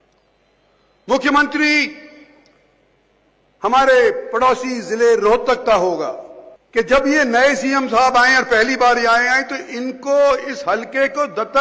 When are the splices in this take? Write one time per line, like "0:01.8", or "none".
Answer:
0:06.6